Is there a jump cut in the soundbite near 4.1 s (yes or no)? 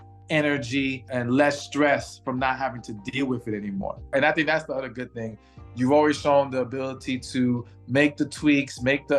yes